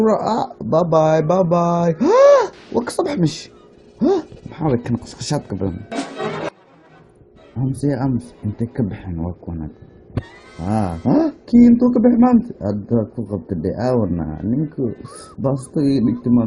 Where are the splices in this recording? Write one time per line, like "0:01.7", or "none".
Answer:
0:12.9

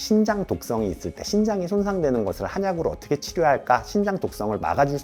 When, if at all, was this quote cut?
none

